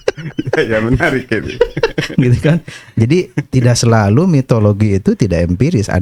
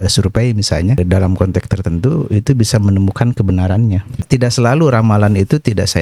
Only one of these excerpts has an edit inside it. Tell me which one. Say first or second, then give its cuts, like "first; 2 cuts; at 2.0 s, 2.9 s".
second; 2 cuts; at 1.0 s, 4.2 s